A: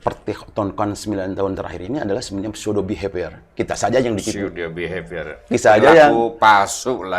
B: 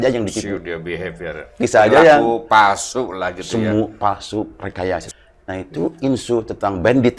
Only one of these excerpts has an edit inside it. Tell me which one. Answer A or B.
B